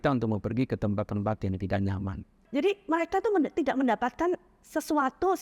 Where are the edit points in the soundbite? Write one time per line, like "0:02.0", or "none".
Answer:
0:02.4